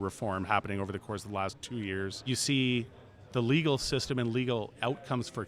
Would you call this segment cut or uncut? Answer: cut